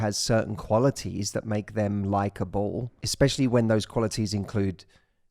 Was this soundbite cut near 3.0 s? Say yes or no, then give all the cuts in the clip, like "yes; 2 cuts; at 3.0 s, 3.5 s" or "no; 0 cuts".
yes; 1 cut; at 3.0 s